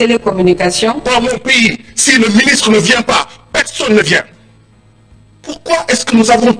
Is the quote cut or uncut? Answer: cut